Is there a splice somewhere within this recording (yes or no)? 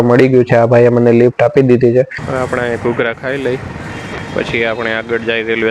yes